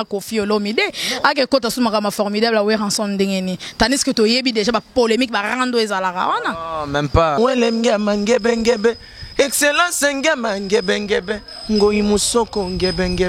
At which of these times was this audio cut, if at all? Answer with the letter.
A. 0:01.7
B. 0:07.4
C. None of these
B